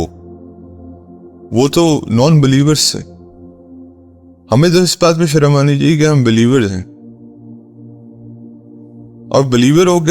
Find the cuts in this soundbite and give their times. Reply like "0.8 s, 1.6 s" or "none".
7.1 s, 9.3 s